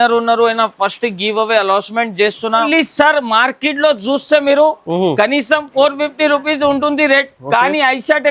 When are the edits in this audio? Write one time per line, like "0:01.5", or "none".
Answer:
0:02.7